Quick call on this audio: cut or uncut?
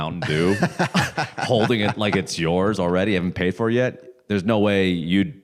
uncut